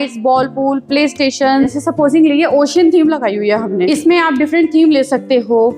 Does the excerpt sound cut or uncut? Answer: cut